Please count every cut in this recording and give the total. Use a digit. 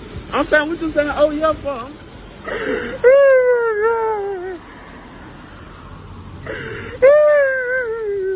1